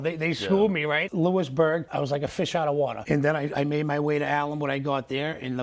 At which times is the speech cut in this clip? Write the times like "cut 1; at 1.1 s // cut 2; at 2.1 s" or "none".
cut 1; at 1.1 s // cut 2; at 1.9 s // cut 3; at 3.0 s